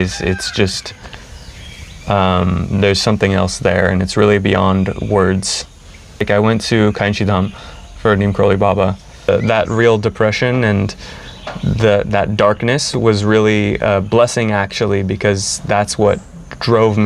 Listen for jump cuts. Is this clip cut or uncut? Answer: cut